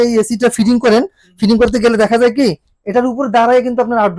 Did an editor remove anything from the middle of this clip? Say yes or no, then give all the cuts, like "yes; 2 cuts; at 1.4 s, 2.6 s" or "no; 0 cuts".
no; 0 cuts